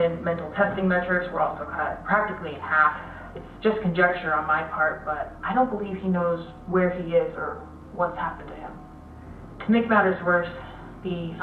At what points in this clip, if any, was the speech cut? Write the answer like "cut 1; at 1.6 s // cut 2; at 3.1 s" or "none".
cut 1; at 9.0 s